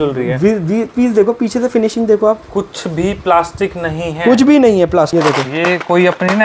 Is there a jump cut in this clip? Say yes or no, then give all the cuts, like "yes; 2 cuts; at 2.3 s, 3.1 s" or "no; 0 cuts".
yes; 1 cut; at 5.1 s